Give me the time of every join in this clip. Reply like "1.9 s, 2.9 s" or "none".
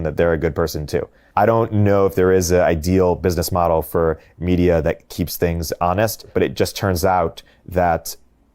1.2 s, 5.1 s, 6.3 s